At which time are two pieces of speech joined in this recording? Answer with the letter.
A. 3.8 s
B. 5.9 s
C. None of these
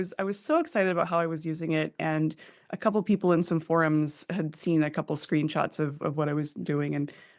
C